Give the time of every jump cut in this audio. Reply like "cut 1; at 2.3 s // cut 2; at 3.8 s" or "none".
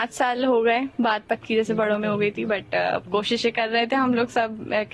none